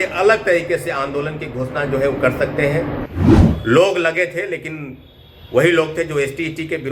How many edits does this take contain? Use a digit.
1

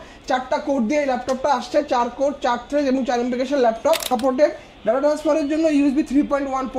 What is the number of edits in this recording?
1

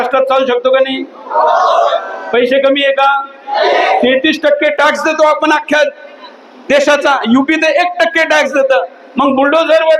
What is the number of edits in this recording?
0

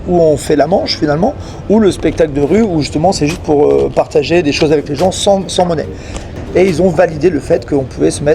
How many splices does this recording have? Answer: 1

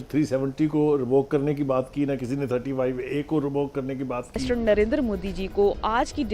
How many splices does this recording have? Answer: 1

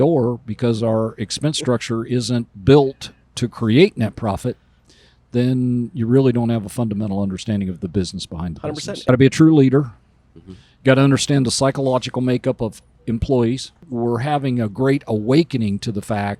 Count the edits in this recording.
2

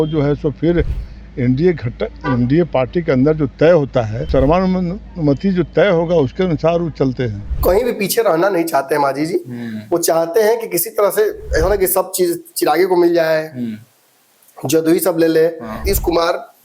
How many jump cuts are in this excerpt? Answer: 3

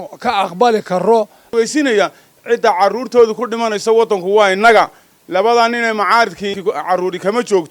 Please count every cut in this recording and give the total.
2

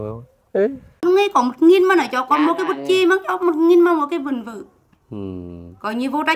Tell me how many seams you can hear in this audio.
1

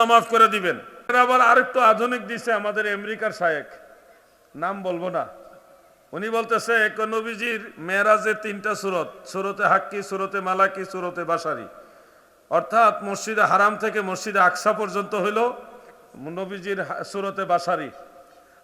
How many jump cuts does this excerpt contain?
1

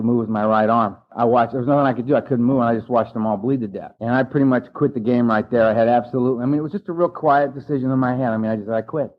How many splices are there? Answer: 2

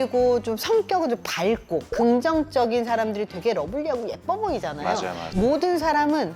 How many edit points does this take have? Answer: 2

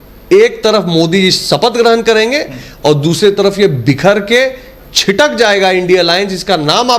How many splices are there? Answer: 0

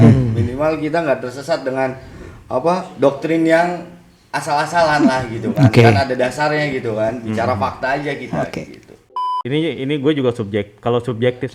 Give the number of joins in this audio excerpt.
1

